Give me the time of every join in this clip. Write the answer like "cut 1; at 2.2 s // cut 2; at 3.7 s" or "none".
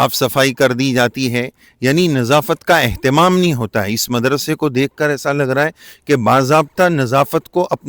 none

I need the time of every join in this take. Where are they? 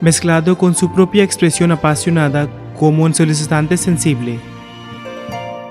cut 1; at 2.6 s // cut 2; at 4.4 s

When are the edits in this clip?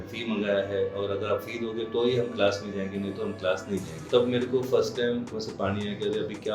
cut 1; at 4.0 s // cut 2; at 5.3 s

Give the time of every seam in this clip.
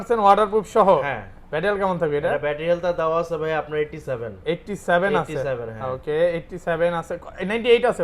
none

